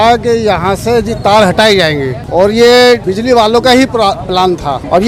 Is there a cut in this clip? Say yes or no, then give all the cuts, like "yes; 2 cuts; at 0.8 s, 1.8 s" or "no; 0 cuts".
no; 0 cuts